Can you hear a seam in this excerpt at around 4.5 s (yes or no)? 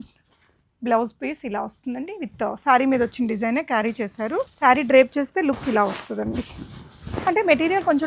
yes